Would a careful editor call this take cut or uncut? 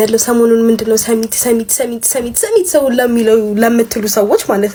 uncut